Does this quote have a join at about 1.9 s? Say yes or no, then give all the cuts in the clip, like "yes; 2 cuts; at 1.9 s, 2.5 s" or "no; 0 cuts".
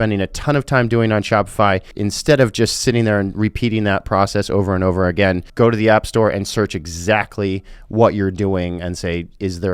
yes; 2 cuts; at 1.9 s, 5.5 s